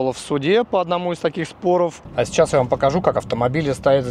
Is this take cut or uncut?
cut